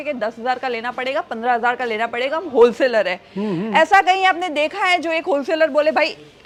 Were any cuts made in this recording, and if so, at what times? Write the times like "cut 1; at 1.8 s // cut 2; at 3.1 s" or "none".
none